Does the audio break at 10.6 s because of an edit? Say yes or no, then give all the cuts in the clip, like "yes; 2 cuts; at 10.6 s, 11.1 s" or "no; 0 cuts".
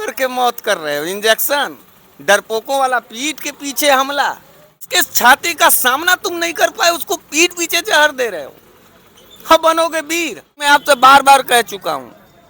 yes; 2 cuts; at 4.9 s, 10.6 s